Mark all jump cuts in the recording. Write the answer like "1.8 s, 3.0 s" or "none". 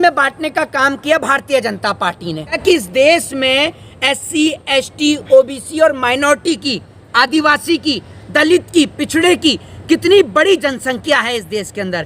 2.6 s